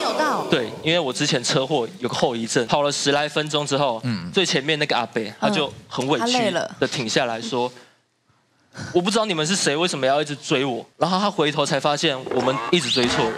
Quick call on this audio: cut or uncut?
cut